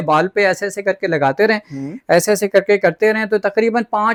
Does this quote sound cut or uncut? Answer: uncut